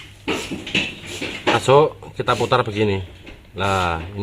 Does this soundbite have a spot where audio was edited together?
yes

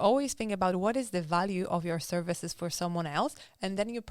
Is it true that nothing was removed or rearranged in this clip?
yes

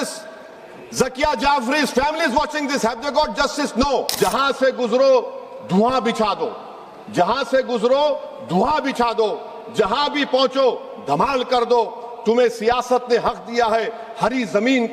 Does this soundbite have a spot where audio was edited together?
yes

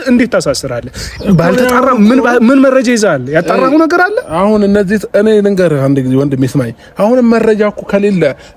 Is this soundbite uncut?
yes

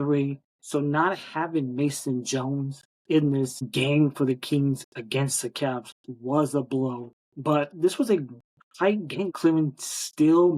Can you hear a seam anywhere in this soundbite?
yes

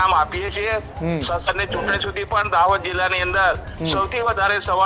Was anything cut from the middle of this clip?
no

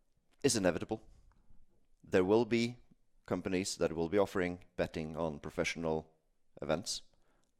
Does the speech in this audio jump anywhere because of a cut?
no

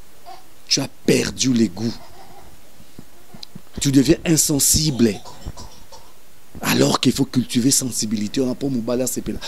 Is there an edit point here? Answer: no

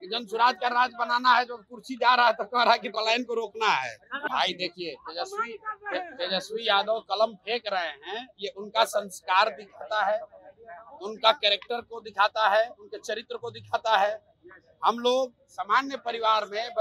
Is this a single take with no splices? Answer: no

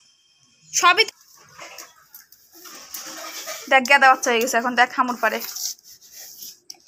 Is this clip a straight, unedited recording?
no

